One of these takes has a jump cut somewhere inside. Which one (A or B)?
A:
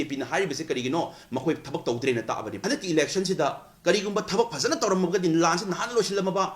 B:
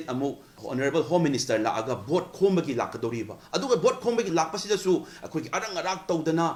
A